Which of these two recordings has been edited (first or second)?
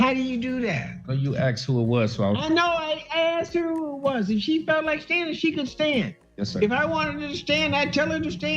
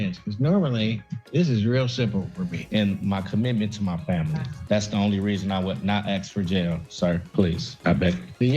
second